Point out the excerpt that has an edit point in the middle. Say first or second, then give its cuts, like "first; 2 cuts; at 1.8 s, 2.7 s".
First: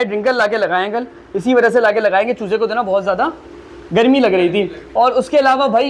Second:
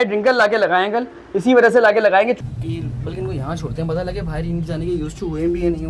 second; 1 cut; at 2.4 s